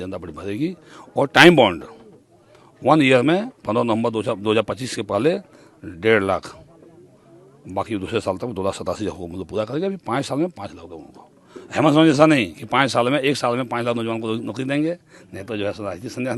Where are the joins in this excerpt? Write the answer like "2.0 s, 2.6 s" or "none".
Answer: none